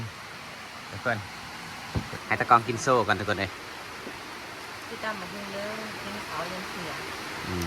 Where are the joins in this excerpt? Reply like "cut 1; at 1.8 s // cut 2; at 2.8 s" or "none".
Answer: cut 1; at 2.2 s